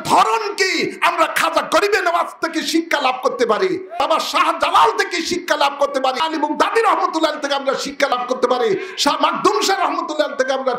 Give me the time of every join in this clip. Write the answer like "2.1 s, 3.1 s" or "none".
4.0 s, 6.2 s, 8.1 s